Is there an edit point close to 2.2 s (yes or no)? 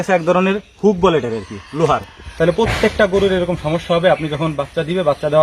yes